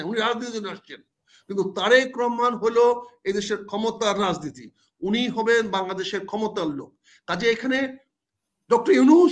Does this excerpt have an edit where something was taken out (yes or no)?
no